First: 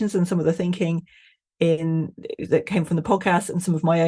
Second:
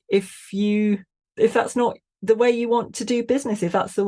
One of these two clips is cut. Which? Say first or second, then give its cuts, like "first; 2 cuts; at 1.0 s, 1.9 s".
second; 1 cut; at 1.2 s